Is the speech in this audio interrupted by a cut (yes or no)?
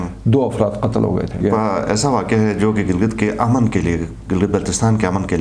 yes